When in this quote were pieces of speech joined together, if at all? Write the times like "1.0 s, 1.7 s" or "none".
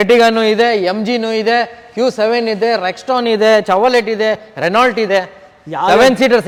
none